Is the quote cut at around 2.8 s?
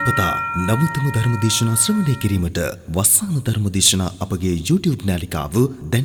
no; 0 cuts

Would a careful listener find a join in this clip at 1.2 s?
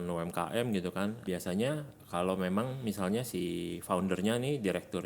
yes; 1 cut; at 1.2 s

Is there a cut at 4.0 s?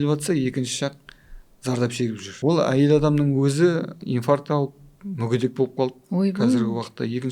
yes; 2 cuts; at 2.3 s, 4.0 s

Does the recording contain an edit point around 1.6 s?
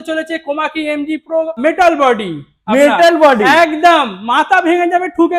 yes; 1 cut; at 1.6 s

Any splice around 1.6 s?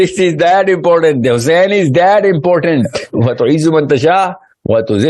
no; 1 cut; at 3.0 s

